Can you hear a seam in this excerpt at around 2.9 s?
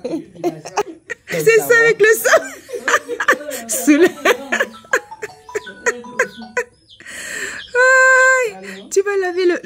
no; 1 cut; at 0.9 s

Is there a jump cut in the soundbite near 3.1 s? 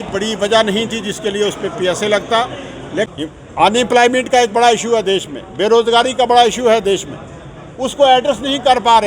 yes; 1 cut; at 3.1 s

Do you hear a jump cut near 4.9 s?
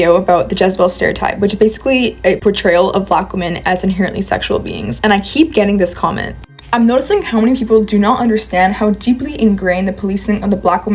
no; 0 cuts

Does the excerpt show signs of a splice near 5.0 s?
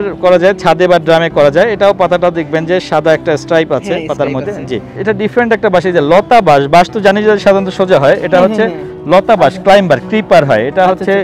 yes; 1 cut; at 5.0 s

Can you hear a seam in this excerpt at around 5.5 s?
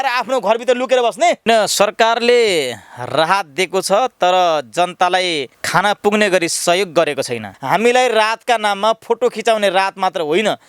yes; 3 cuts; at 1.4 s, 5.5 s, 7.5 s

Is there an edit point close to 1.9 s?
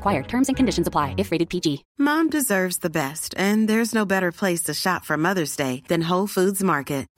yes; 1 cut; at 1.9 s

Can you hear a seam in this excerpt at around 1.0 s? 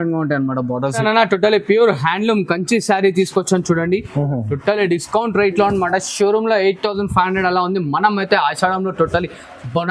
yes; 1 cut; at 1.0 s

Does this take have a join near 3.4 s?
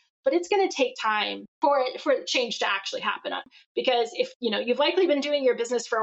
yes; 2 cuts; at 1.4 s, 3.4 s

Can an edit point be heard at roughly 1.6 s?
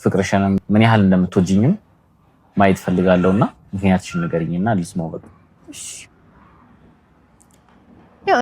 no; 1 cut; at 5.5 s

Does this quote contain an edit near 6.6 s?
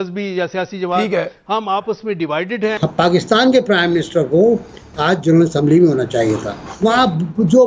yes; 2 cuts; at 2.9 s, 6.6 s

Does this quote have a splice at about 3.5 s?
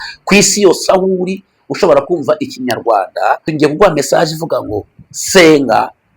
yes; 1 cut; at 3.5 s

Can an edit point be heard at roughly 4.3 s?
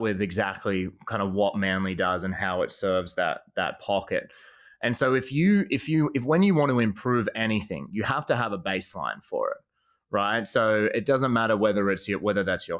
no; 0 cuts

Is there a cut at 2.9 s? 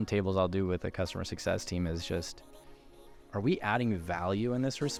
no; 0 cuts

